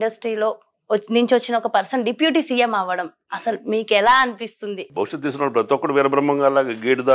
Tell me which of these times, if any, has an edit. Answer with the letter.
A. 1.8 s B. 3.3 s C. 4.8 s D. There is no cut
C